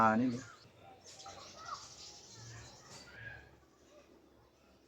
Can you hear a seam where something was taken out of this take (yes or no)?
yes